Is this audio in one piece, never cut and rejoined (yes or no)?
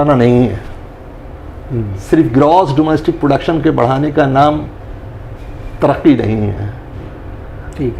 yes